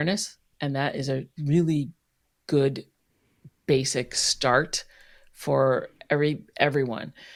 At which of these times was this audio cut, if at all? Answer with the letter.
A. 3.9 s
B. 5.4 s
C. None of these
C